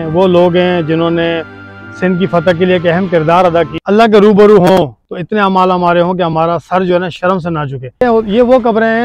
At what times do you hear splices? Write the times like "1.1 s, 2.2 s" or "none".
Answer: 3.7 s, 8.0 s